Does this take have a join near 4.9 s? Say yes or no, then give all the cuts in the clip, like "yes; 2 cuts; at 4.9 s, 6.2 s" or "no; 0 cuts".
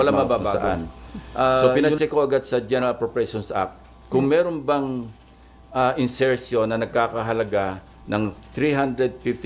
no; 1 cut; at 1.6 s